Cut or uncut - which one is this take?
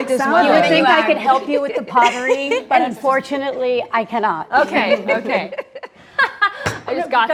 uncut